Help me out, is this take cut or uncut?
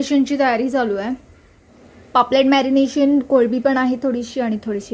uncut